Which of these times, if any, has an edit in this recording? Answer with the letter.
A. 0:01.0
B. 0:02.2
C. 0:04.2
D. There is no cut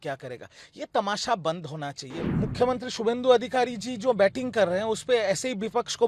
B